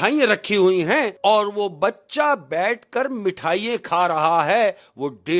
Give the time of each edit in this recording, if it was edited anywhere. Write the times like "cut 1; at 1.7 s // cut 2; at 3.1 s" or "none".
cut 1; at 1.1 s